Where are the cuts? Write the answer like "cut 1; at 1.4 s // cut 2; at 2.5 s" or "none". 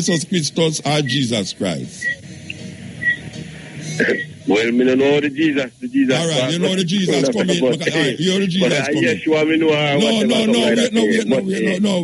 none